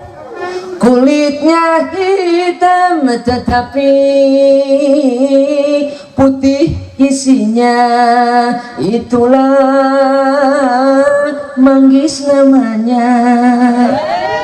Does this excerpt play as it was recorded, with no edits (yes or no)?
yes